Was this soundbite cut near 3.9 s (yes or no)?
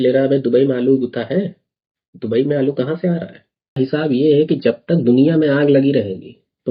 yes